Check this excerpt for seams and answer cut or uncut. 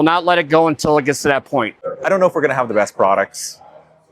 cut